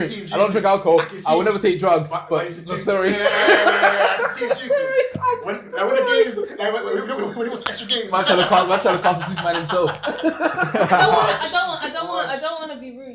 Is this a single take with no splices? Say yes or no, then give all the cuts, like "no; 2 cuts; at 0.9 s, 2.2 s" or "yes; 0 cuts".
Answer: yes; 0 cuts